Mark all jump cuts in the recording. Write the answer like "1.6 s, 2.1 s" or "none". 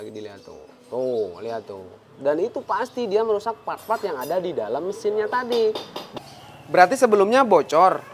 6.0 s